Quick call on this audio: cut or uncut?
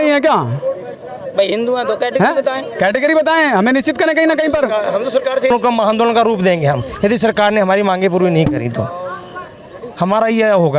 cut